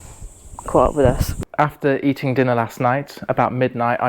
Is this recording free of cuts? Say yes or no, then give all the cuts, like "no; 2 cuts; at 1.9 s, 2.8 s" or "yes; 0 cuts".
no; 1 cut; at 1.3 s